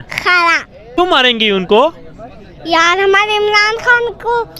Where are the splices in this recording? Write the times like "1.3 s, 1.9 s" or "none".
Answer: 1.0 s